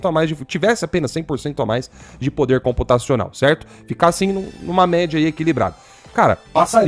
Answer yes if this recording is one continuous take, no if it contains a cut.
yes